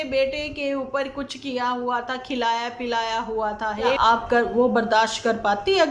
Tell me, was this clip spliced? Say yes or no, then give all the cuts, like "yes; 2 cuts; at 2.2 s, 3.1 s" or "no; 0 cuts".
yes; 1 cut; at 4.0 s